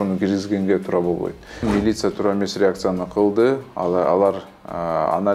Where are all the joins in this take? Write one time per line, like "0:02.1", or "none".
0:01.6